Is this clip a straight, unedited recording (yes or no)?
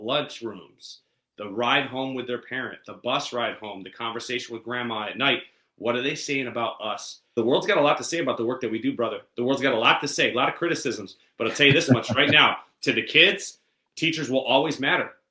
no